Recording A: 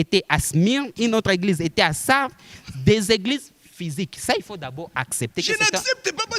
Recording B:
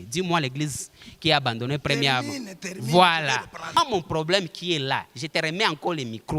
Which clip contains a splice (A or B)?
B